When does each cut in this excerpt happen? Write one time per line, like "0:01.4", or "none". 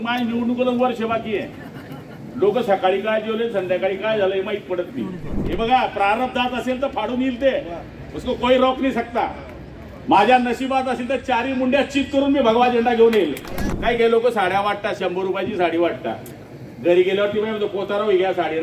0:05.4
0:13.6